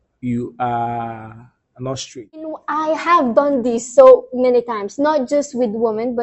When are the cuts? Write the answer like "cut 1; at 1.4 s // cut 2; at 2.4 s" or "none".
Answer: cut 1; at 2.6 s